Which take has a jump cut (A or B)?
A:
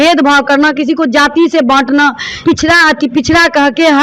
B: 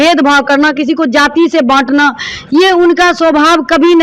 A